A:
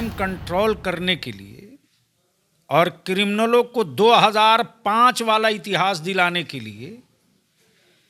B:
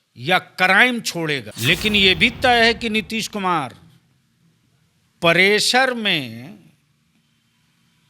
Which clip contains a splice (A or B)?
B